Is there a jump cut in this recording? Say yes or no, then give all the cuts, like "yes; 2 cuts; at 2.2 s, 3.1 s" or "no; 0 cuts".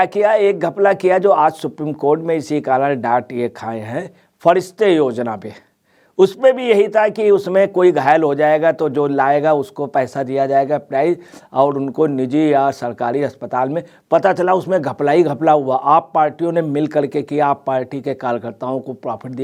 no; 0 cuts